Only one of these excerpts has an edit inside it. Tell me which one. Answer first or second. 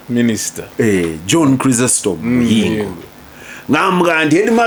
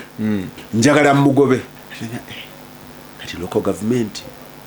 second